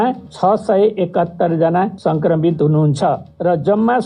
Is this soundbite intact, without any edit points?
yes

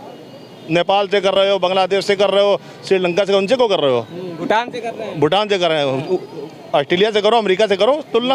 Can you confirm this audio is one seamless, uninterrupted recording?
yes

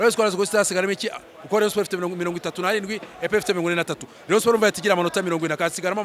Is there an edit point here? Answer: no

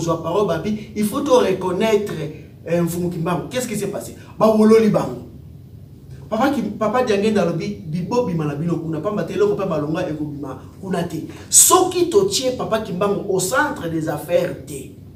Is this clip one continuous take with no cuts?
yes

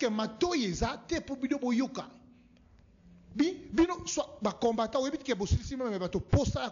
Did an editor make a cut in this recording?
no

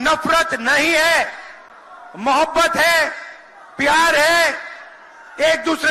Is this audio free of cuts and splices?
yes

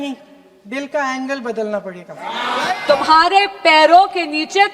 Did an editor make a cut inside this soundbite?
yes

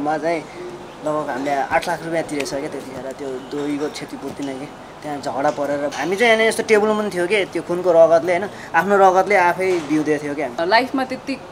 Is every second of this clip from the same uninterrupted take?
no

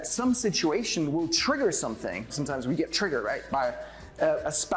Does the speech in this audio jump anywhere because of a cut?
yes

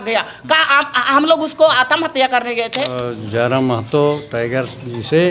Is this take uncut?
no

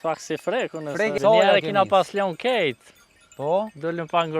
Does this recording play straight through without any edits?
no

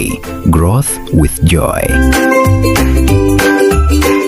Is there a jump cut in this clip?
no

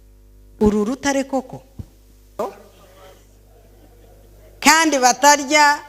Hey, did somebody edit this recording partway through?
yes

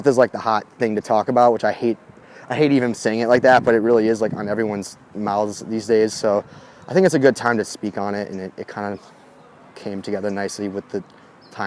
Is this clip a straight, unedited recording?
yes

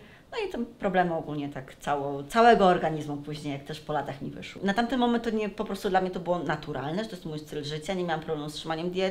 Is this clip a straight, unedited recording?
no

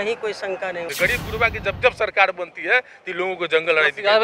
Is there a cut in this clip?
yes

